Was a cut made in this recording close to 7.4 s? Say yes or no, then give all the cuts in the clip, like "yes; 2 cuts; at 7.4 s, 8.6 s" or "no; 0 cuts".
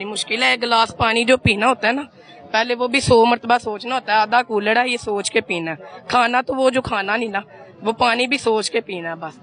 no; 0 cuts